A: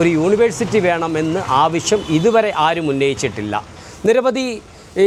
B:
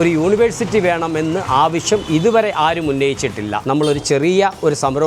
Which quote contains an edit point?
B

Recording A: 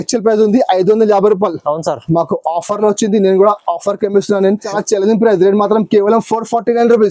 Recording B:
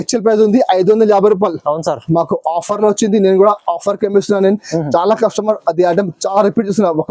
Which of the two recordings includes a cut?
A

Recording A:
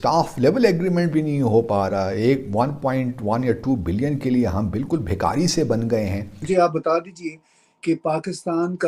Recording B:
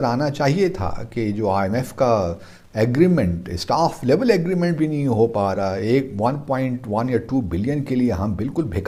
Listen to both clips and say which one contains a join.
A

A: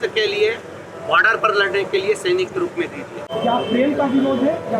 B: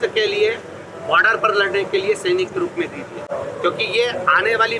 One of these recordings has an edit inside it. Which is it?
A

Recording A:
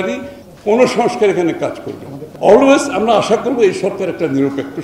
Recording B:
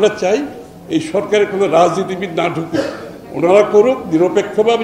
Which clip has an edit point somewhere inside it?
A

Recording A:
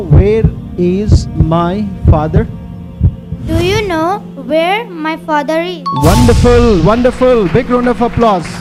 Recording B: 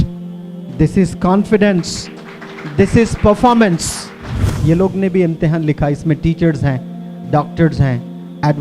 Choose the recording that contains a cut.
B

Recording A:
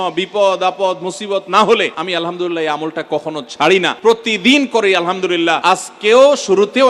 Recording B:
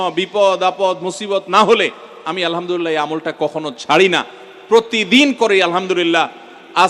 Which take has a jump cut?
A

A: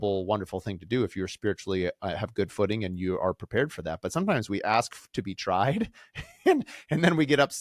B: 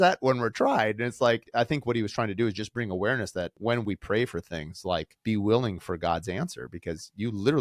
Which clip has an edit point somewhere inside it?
B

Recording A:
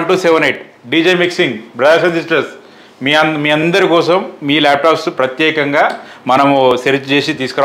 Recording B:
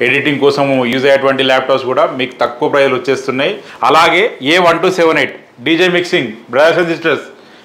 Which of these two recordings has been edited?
B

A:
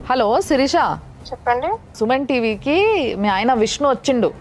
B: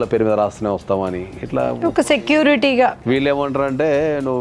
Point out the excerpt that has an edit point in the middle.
B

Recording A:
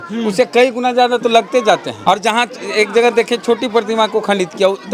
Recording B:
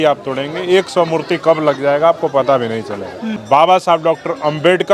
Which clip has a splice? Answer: A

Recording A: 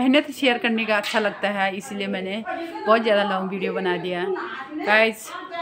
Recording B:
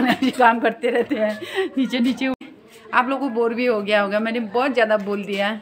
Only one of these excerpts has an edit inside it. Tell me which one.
B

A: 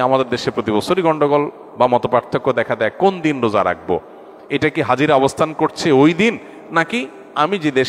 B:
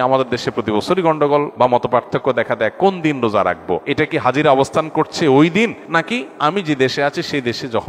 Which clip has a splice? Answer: B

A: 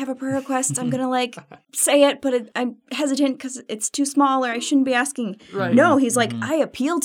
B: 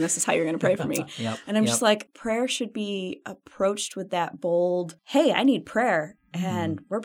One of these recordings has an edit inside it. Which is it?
B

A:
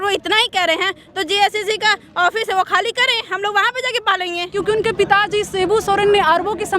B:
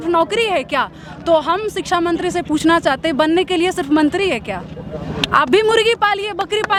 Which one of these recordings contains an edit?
A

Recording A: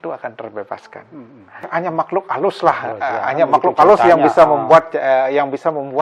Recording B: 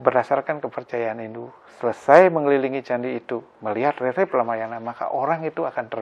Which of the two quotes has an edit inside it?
A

